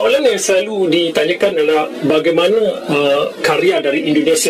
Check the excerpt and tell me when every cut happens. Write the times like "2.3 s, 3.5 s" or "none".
none